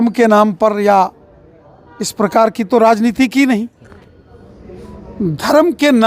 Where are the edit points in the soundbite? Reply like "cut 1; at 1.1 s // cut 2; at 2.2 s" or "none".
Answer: cut 1; at 3.8 s